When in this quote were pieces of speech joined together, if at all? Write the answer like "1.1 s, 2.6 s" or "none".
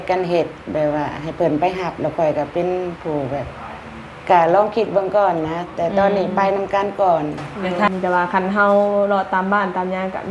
7.9 s